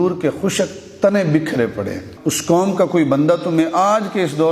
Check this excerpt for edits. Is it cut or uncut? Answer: cut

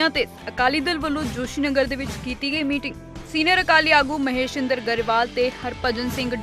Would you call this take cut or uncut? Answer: uncut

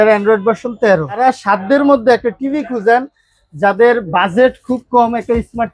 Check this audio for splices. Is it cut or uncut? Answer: cut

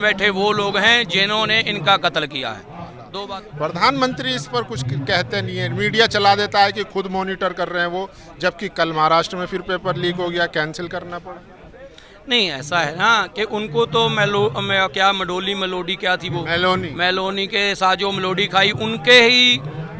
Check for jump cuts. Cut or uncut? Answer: cut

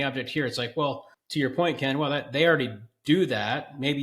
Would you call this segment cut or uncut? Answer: cut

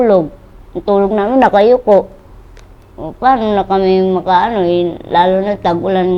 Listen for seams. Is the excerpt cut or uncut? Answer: uncut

